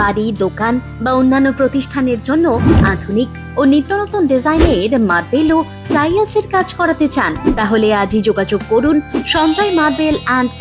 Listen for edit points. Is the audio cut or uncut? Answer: uncut